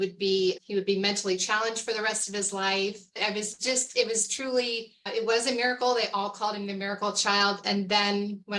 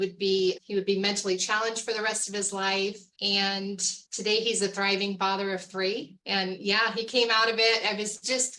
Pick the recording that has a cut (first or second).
first